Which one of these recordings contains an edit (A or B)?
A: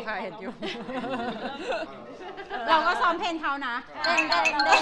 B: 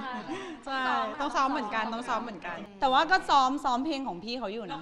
B